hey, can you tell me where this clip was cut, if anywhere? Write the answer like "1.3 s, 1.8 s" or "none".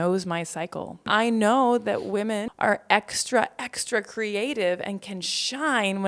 1.1 s, 2.5 s